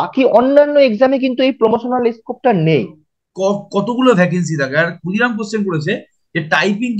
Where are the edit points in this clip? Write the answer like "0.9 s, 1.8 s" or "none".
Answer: 3.0 s